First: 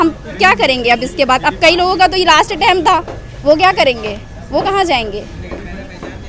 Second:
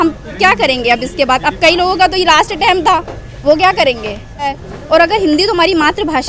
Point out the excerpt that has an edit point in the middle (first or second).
second